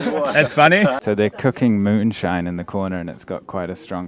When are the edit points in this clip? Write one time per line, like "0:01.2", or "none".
0:01.0